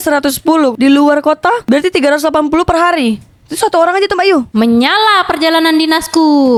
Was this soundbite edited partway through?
no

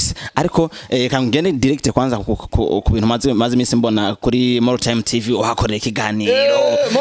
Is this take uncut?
yes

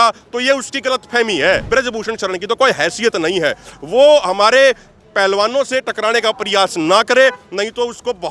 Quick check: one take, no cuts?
no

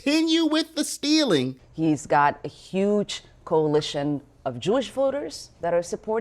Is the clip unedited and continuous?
no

